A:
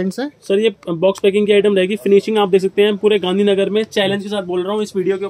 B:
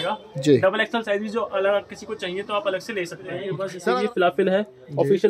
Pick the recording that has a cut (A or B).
B